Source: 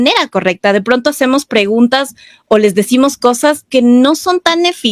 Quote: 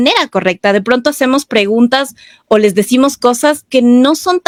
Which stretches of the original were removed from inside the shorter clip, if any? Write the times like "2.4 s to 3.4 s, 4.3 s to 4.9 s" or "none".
none